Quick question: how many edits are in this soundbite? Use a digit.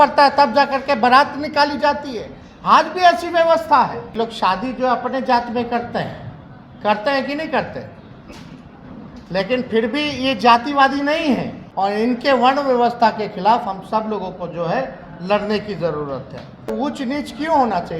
3